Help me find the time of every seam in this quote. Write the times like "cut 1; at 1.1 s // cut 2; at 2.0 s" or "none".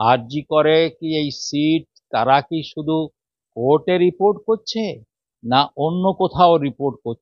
none